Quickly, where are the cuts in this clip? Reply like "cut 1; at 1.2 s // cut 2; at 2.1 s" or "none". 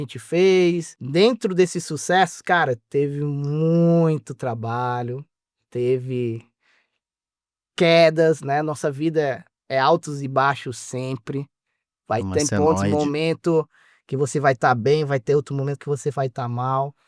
cut 1; at 0.9 s